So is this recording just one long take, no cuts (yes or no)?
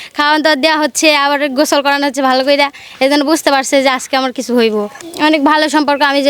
no